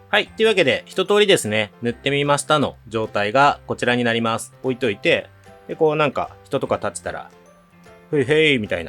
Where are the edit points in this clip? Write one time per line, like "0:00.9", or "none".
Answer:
0:04.5